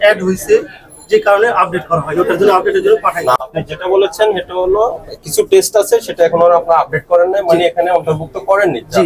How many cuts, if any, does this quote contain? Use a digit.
1